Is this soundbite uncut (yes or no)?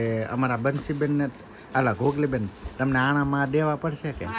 yes